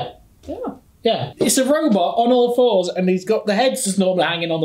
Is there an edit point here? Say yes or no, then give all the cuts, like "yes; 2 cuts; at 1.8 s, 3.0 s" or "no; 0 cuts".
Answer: yes; 1 cut; at 1.3 s